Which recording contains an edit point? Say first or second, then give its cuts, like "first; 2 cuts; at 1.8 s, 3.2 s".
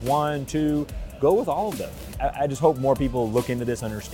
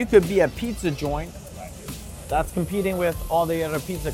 first; 1 cut; at 2.1 s